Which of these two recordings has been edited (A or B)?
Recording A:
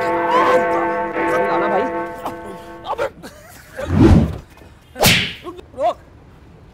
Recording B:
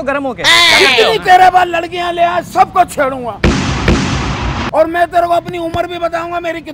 A